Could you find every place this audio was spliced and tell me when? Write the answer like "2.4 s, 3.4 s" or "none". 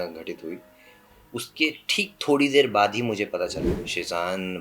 3.7 s